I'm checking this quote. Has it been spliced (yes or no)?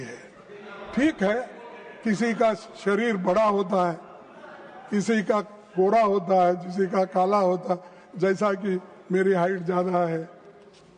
no